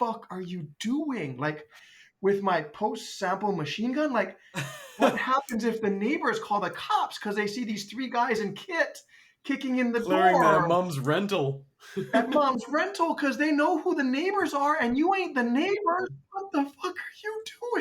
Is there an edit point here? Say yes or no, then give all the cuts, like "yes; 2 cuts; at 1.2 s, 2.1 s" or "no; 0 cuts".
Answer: yes; 1 cut; at 16.1 s